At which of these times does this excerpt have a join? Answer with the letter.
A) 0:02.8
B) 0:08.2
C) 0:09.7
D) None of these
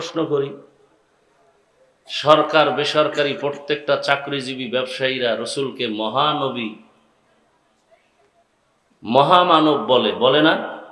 D